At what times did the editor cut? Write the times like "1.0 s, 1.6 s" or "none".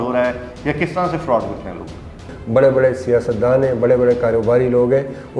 2.2 s

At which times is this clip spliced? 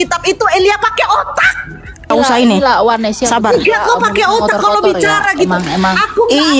2.1 s

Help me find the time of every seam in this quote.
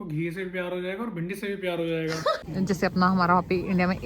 2.4 s

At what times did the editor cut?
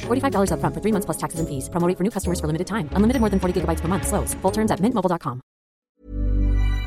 6.0 s

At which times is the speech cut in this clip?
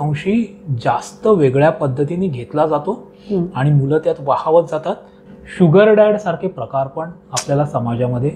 5.2 s

